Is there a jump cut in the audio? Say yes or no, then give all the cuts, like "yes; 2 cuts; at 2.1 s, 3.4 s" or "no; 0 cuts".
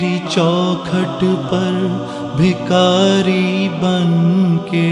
no; 0 cuts